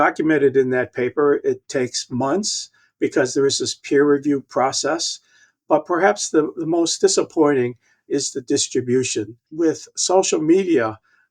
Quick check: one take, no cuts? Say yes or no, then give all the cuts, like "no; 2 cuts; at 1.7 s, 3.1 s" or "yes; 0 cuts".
no; 1 cut; at 9.4 s